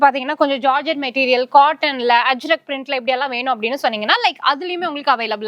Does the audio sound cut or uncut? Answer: uncut